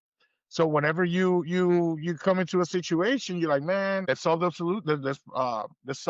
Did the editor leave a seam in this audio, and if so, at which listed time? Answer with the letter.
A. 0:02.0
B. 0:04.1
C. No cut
B